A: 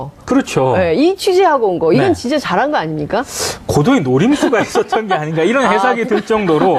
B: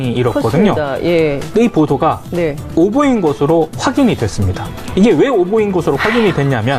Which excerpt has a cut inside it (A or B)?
A